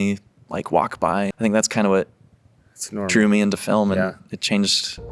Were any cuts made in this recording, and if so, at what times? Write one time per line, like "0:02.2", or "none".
0:01.3